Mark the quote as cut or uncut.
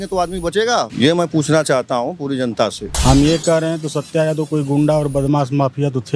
cut